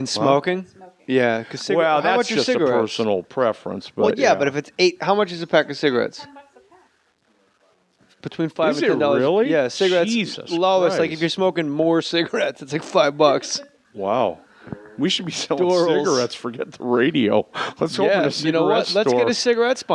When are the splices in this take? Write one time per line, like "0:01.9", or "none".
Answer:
0:13.9